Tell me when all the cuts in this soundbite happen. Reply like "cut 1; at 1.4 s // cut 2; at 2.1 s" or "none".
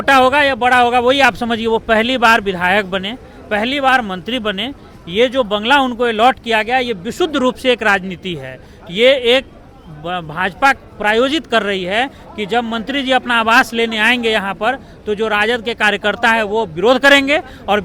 none